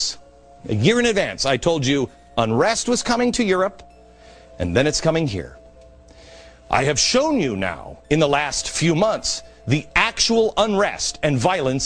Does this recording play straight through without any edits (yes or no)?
yes